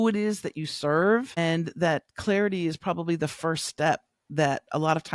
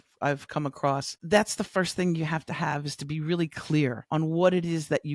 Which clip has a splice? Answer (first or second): second